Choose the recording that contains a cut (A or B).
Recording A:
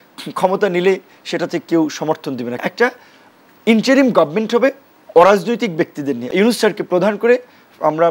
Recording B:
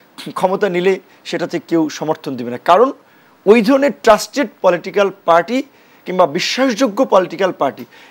A